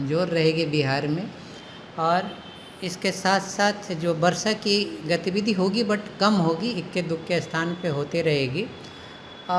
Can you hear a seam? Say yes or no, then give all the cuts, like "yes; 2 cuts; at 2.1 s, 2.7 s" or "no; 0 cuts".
no; 0 cuts